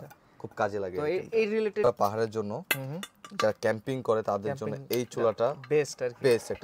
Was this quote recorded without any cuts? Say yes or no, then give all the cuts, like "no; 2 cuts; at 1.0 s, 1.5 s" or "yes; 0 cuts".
no; 1 cut; at 1.9 s